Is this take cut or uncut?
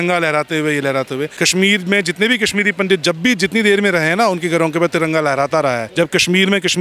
cut